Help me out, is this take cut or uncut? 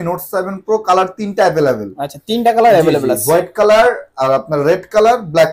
uncut